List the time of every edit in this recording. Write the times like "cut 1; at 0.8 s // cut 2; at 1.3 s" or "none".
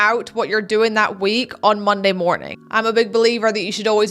cut 1; at 2.5 s